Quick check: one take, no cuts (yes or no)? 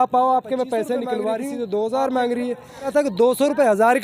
no